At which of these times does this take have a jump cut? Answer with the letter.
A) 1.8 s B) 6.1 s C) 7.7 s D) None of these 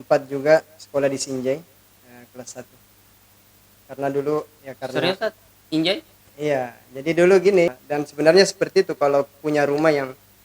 C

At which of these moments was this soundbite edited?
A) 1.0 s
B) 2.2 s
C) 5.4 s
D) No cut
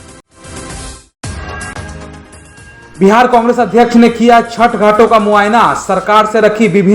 B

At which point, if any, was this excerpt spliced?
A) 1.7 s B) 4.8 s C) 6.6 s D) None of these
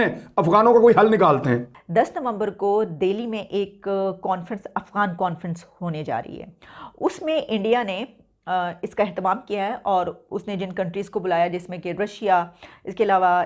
A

